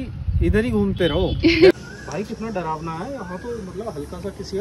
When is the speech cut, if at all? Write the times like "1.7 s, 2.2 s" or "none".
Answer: 1.7 s